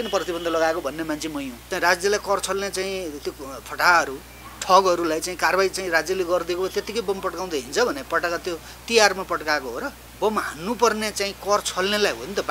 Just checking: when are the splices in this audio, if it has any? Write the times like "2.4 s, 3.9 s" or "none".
1.6 s, 10.0 s